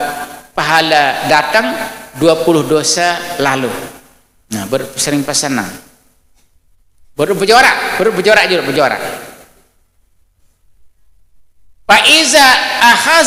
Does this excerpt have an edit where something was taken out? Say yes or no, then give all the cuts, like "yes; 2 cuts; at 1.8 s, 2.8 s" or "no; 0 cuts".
no; 0 cuts